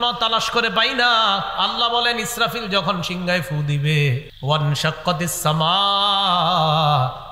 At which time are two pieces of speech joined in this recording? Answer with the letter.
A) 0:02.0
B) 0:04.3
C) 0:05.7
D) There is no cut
B